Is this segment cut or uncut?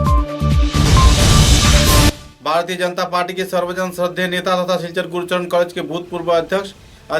cut